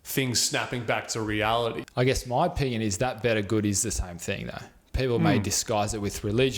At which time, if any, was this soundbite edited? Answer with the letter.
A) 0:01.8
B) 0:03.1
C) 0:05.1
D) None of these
A